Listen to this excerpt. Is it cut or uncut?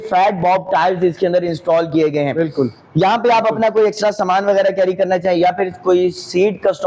uncut